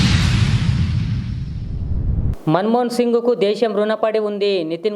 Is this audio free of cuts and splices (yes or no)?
yes